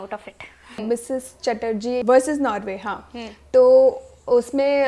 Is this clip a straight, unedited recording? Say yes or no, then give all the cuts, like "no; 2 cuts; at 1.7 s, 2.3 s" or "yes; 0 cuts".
no; 2 cuts; at 0.8 s, 2.0 s